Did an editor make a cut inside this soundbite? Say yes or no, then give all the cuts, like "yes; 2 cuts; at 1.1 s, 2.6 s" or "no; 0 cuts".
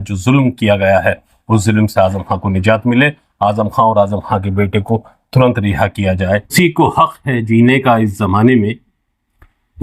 yes; 1 cut; at 6.5 s